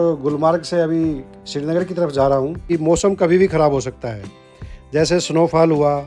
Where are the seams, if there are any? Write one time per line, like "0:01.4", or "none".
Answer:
0:02.6